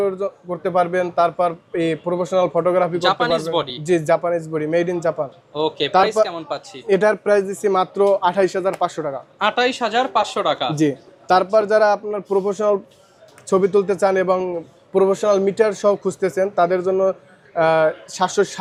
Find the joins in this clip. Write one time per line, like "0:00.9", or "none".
none